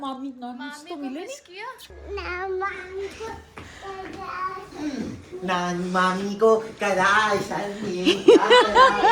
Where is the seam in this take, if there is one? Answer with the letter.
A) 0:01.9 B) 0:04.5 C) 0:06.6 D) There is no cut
A